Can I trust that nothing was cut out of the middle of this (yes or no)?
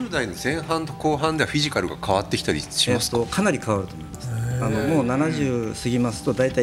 yes